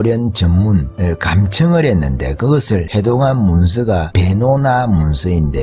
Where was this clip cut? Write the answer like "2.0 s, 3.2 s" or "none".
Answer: 0.9 s, 2.9 s, 4.1 s